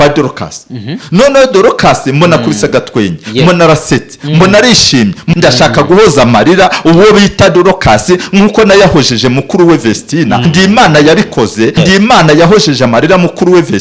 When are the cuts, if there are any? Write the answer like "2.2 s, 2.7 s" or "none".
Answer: 5.3 s, 10.5 s, 11.8 s